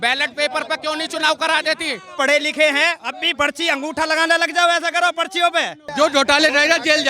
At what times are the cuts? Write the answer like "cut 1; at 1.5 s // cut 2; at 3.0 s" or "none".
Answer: cut 1; at 2.1 s // cut 2; at 5.8 s